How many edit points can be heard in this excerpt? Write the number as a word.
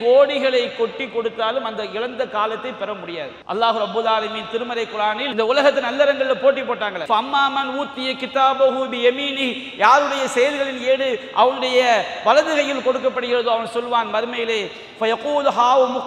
three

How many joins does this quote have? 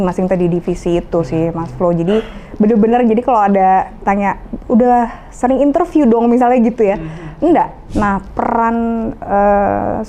one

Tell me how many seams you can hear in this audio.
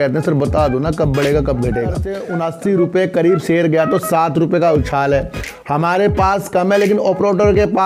one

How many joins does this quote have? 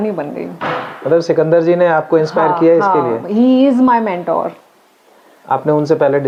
zero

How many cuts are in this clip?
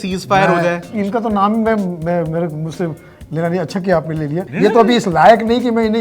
two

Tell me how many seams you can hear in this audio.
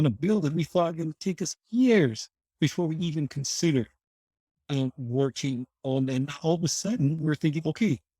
zero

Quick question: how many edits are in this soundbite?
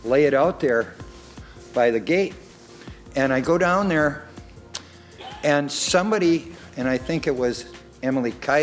one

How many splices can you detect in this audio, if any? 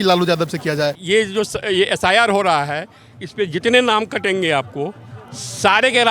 one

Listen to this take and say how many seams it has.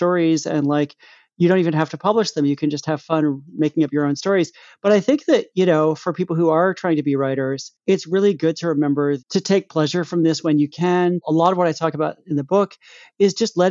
one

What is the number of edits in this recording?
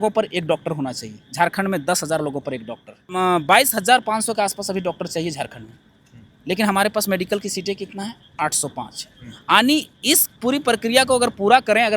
one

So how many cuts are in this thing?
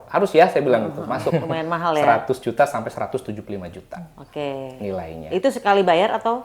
one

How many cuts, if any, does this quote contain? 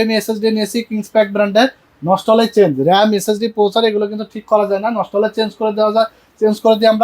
zero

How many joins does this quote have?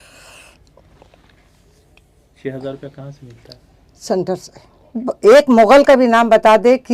one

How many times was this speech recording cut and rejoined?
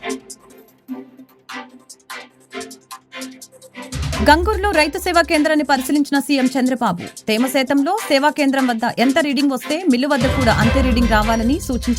one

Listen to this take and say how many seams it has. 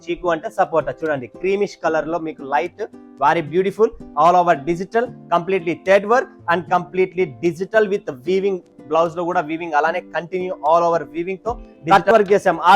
one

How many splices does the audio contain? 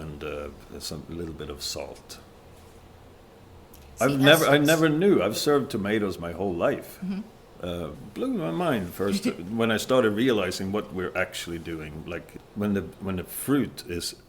two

